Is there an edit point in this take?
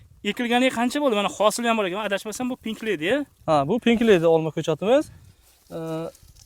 no; 0 cuts

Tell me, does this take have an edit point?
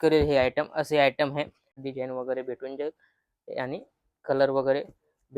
yes; 1 cut; at 1.8 s

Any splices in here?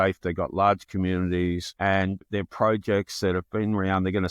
yes; 1 cut; at 2.2 s

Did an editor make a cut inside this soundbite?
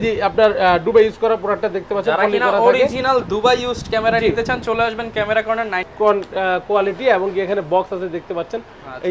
yes; 1 cut; at 5.9 s

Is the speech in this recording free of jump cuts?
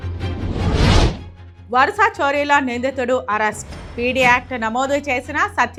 yes; 0 cuts

